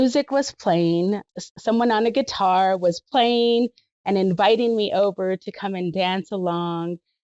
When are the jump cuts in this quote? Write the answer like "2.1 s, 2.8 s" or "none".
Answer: 1.3 s